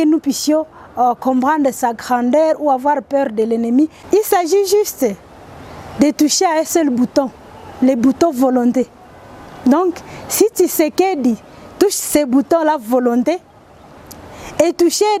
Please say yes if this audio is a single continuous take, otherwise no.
no